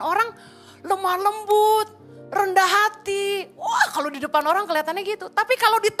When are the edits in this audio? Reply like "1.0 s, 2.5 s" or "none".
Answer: none